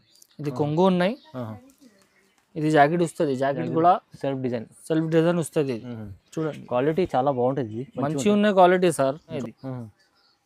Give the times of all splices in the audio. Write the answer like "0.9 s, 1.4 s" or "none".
9.3 s